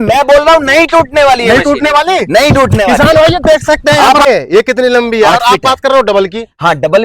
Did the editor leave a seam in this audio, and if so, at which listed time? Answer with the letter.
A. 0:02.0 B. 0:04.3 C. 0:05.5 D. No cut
B